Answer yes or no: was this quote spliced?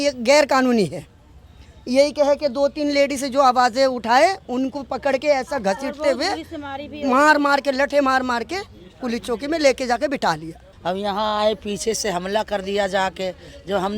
yes